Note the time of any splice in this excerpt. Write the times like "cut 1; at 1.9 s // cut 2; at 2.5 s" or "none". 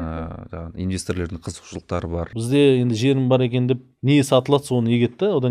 cut 1; at 2.3 s